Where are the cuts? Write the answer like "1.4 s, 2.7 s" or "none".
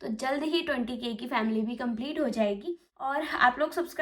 2.9 s